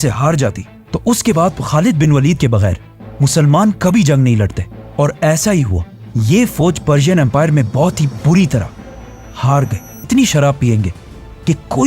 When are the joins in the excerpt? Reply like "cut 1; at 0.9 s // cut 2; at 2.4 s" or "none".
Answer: cut 1; at 10.1 s